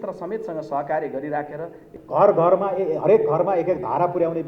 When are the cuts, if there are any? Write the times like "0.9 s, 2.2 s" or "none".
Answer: 1.9 s